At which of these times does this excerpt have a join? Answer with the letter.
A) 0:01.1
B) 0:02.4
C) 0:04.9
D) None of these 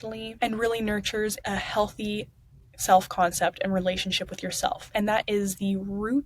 C